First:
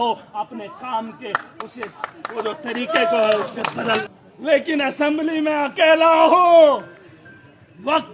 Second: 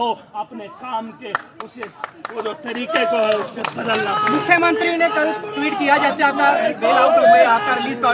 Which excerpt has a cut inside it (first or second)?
first